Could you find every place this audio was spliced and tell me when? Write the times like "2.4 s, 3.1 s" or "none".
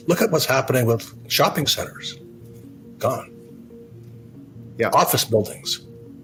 none